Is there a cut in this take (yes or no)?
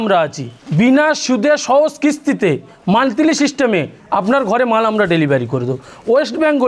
no